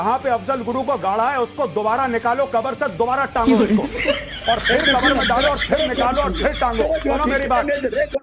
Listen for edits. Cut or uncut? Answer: uncut